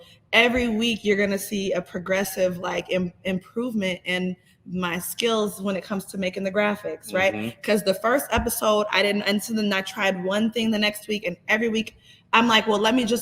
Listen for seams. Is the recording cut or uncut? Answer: uncut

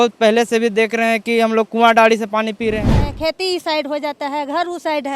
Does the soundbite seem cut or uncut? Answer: cut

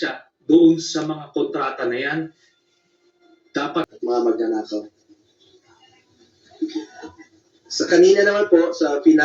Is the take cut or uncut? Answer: cut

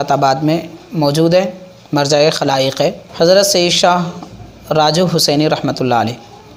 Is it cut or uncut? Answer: cut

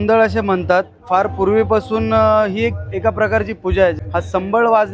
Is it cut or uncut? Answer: cut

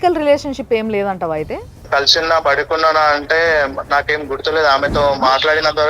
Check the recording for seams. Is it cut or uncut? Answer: cut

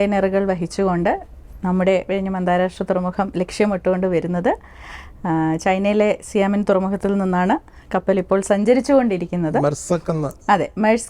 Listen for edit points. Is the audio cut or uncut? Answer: uncut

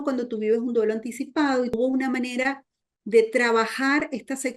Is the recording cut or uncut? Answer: cut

